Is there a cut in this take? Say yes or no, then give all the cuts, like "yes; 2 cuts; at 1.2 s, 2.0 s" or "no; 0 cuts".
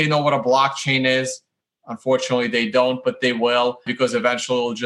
yes; 1 cut; at 3.9 s